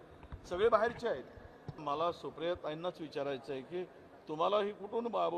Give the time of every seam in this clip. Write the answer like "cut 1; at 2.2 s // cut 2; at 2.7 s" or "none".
cut 1; at 1.8 s